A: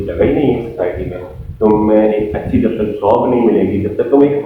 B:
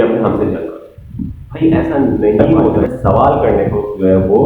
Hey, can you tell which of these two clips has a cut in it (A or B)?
B